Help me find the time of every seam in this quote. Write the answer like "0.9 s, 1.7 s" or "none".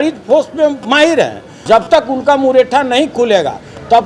1.5 s